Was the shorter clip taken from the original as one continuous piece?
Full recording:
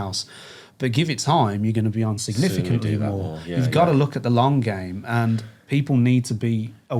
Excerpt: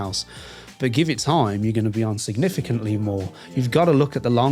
yes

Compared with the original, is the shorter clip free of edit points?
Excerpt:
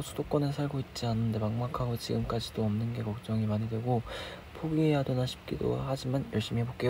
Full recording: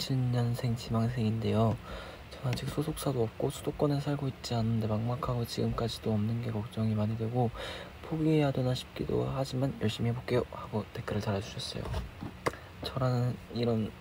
yes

